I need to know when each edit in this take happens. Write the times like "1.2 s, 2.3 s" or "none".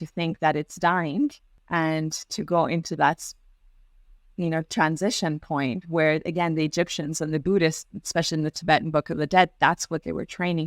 1.5 s